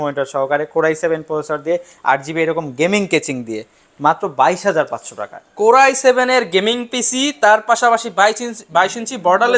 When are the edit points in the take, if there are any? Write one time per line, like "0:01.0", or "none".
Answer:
none